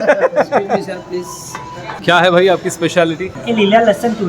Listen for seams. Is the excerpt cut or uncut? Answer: cut